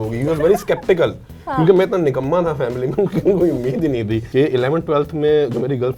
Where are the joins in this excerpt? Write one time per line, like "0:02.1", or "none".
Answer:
0:04.2

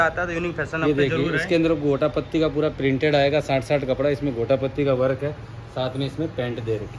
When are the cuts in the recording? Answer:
none

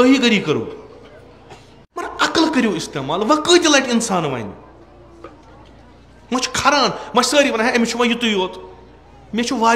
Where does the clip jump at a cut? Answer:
0:02.0

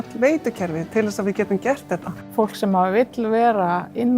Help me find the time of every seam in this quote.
0:02.3

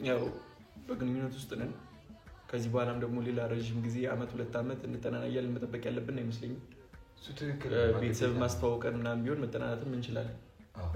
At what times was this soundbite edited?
none

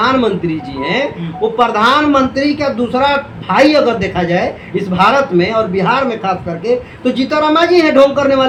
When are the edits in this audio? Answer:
none

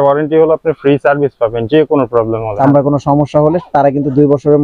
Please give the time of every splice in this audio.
0:02.6

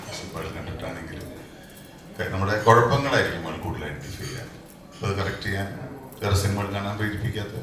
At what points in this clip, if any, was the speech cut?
0:06.1

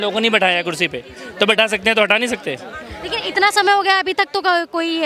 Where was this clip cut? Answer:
none

